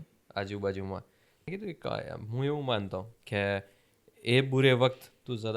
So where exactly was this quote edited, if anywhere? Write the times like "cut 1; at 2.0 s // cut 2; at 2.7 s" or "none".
cut 1; at 1.4 s